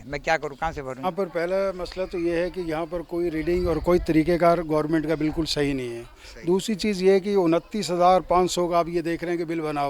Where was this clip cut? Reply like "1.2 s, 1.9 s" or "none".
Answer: 1.1 s

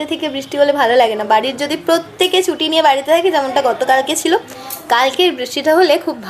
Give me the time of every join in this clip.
none

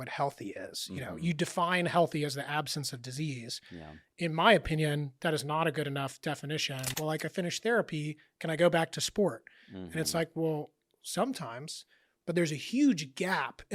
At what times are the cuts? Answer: 6.9 s

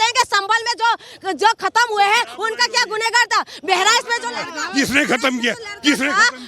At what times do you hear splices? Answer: none

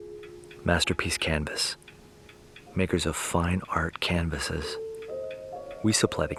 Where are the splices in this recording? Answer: none

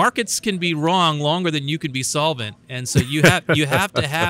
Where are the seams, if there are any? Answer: none

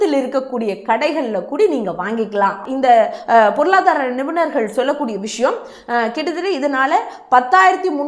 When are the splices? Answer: 2.6 s

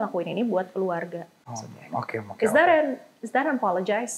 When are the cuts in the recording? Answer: 1.5 s

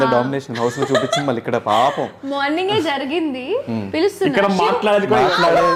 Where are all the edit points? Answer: none

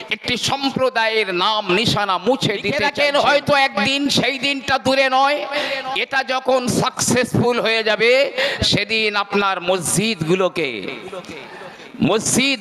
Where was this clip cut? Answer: 2.8 s

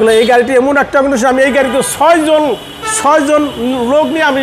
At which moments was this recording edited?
none

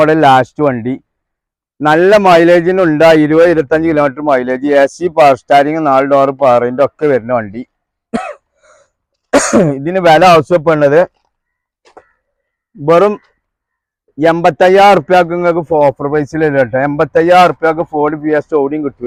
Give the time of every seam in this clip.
none

